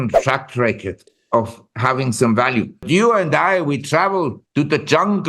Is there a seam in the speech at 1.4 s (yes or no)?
no